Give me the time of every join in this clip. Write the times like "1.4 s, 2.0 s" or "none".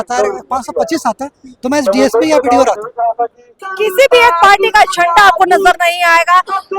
3.6 s